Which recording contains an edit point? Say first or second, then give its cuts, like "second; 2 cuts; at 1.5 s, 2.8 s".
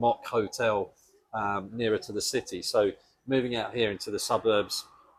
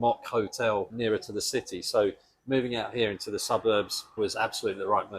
second; 2 cuts; at 0.9 s, 4.0 s